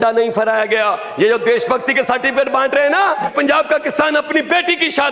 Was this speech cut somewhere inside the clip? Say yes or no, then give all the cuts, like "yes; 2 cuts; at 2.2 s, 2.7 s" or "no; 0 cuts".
yes; 1 cut; at 3.3 s